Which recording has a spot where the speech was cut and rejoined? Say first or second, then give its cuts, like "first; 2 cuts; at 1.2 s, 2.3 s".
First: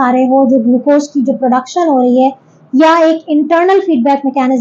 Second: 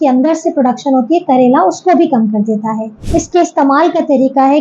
second; 1 cut; at 3.0 s